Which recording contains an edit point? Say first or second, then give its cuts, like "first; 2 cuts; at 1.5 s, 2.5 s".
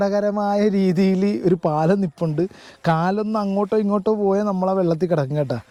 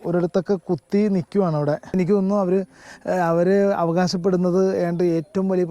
second; 1 cut; at 1.9 s